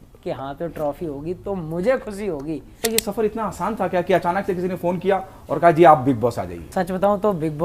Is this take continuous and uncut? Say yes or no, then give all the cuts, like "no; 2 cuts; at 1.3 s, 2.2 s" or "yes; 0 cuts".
no; 2 cuts; at 2.8 s, 6.5 s